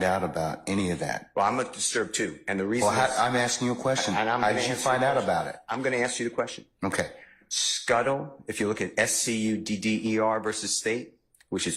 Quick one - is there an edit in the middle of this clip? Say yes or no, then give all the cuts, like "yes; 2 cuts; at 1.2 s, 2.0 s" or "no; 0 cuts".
no; 0 cuts